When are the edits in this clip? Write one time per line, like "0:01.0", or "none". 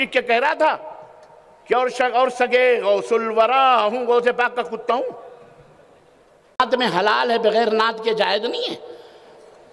0:06.6